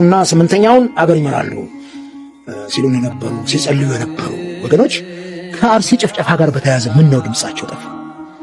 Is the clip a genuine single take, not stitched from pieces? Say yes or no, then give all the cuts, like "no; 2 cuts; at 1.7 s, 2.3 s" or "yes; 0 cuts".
yes; 0 cuts